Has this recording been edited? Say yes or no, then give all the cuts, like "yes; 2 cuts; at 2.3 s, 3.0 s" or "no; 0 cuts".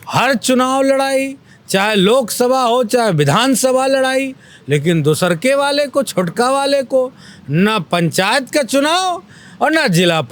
no; 0 cuts